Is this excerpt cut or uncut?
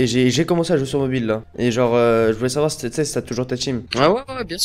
cut